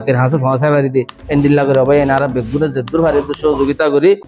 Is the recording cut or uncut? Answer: uncut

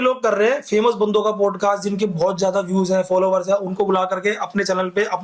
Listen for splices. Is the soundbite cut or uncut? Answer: uncut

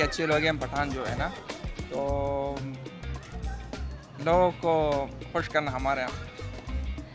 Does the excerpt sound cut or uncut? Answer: uncut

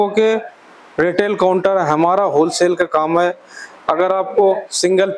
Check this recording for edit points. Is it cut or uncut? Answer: uncut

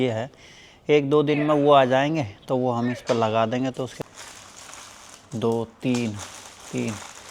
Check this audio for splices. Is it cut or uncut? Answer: cut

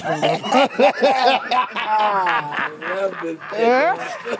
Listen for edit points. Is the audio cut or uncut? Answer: cut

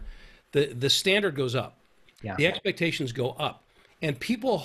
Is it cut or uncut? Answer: uncut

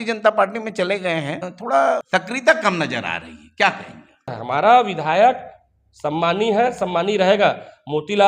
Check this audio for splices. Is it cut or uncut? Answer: cut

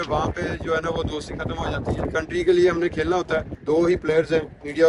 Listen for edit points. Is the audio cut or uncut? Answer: cut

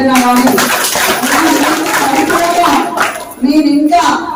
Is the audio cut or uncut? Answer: uncut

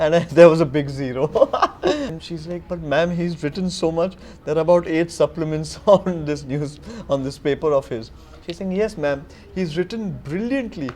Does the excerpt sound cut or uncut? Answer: cut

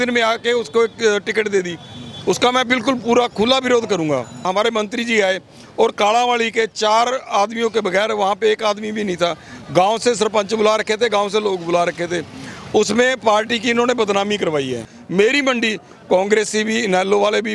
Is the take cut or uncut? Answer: cut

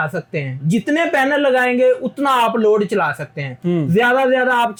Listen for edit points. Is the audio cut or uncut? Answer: uncut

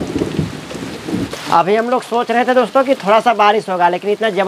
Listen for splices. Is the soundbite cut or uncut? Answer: cut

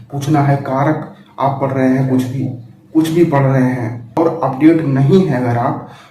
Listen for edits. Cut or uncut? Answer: cut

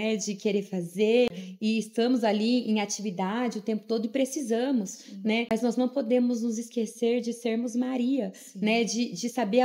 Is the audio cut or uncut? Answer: cut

